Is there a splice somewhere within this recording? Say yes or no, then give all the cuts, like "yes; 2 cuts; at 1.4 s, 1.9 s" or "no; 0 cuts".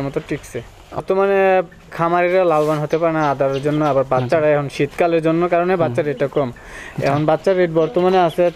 yes; 1 cut; at 1.0 s